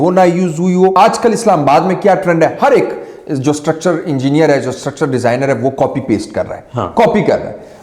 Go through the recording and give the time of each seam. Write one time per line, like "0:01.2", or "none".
0:01.0